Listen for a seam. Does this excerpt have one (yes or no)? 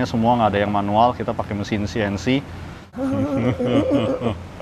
yes